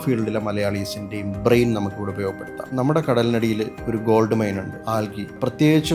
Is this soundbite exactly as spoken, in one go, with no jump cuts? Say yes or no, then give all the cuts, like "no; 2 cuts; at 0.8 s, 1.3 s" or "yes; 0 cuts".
no; 2 cuts; at 2.6 s, 4.7 s